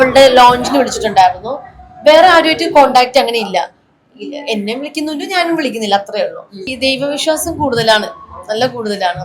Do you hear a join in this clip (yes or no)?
yes